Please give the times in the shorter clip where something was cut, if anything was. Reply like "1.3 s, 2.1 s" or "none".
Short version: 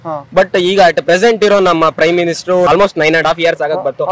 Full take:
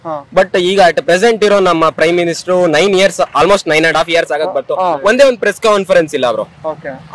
2.7 s